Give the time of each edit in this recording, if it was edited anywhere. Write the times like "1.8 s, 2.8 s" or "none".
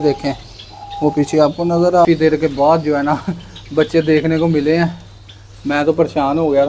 2.1 s